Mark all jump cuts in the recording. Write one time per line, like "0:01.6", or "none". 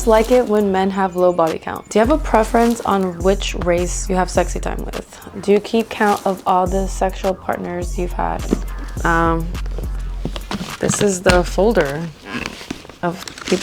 0:01.7
0:05.2
0:08.4